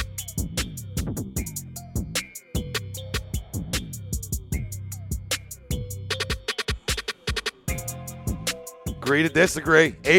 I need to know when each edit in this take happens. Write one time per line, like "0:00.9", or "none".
none